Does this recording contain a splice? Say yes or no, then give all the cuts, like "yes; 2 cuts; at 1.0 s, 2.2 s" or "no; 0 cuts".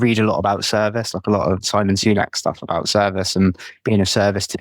yes; 1 cut; at 1.6 s